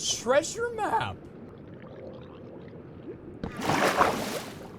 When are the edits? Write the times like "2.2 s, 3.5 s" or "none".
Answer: 1.5 s